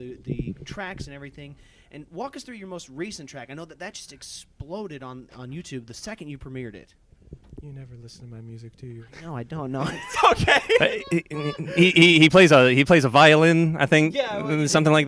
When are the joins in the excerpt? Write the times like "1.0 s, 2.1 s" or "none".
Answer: 11.0 s